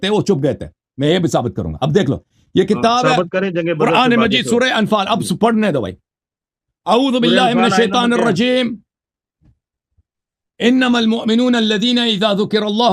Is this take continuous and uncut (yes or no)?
yes